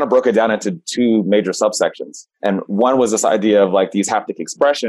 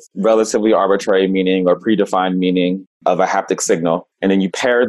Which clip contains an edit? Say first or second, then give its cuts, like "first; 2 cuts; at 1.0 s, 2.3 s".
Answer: second; 1 cut; at 2.9 s